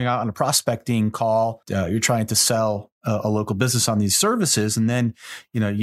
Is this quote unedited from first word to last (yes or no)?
no